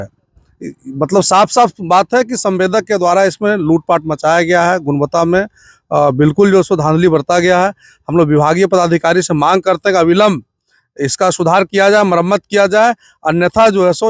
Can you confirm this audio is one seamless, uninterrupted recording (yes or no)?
yes